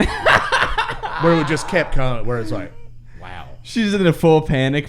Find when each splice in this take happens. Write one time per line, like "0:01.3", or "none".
none

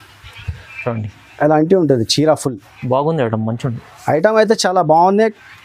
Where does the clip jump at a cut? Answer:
none

